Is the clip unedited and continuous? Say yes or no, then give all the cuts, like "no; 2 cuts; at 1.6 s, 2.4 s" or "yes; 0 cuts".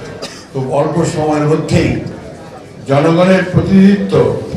yes; 0 cuts